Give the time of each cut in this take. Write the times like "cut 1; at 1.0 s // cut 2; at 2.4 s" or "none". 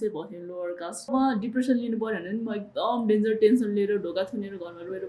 cut 1; at 1.1 s